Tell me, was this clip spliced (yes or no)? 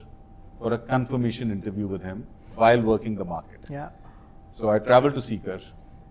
no